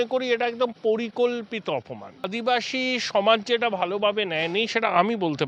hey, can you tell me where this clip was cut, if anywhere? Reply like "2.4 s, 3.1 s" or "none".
2.3 s

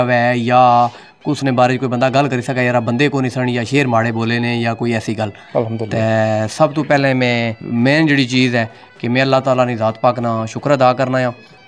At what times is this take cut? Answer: none

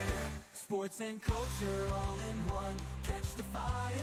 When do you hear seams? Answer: none

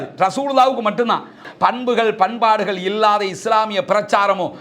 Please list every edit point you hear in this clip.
1.4 s

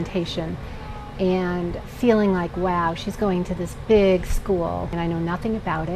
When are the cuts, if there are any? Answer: 5.0 s

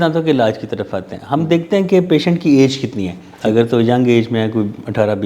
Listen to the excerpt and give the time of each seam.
none

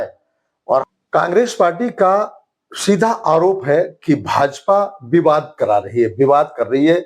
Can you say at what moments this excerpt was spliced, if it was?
1.0 s

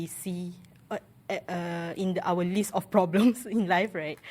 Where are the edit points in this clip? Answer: none

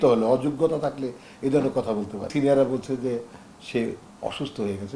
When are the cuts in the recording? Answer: 2.3 s

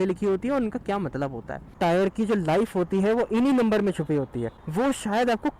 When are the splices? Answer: 1.7 s, 4.5 s

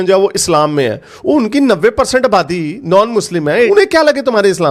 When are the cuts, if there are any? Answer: 3.7 s

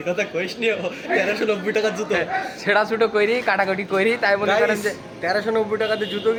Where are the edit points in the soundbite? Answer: none

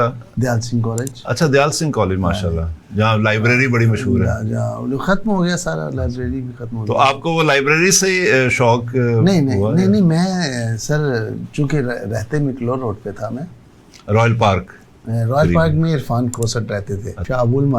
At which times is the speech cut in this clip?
none

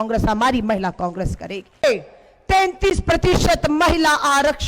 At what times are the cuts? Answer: 1.8 s

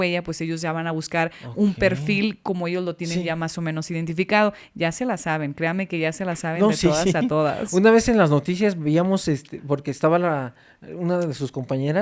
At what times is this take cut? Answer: none

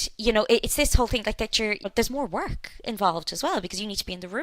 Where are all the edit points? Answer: 1.9 s

